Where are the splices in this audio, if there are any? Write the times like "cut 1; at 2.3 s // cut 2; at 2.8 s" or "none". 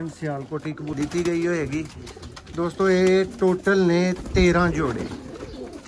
cut 1; at 1.1 s